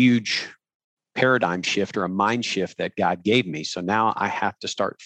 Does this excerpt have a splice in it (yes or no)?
no